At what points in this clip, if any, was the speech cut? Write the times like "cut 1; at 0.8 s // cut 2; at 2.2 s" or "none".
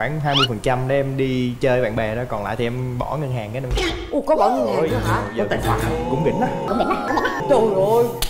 none

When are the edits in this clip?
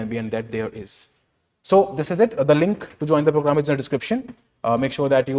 none

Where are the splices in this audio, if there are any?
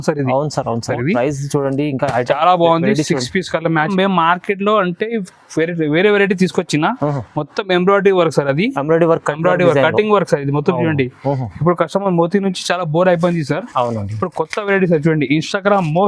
cut 1; at 0.9 s // cut 2; at 3.9 s

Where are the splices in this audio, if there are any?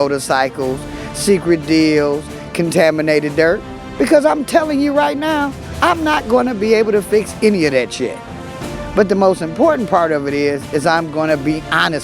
cut 1; at 4.8 s

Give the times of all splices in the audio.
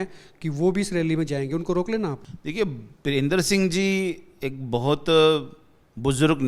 cut 1; at 2.3 s

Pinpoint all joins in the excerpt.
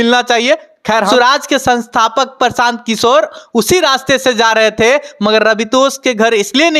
cut 1; at 1.1 s

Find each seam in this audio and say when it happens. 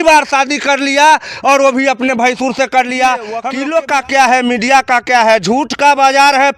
cut 1; at 3.5 s

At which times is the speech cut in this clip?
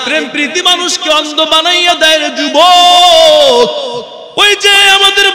cut 1; at 4.2 s

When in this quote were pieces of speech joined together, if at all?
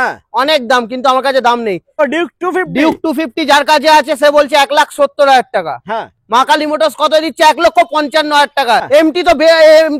cut 1; at 2.0 s // cut 2; at 8.8 s

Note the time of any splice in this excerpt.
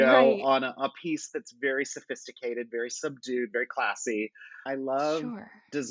cut 1; at 4.6 s

